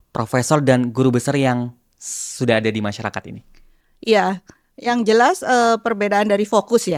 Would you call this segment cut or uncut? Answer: uncut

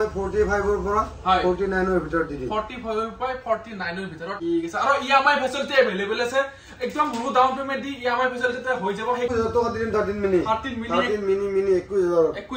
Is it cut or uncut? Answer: cut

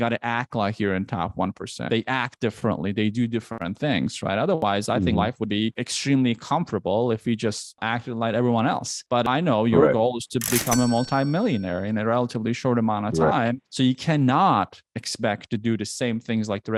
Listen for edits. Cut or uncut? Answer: uncut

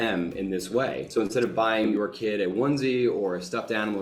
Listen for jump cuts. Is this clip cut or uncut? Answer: cut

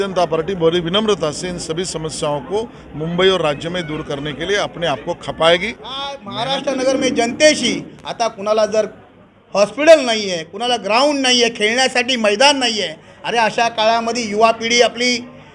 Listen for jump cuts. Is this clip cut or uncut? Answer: cut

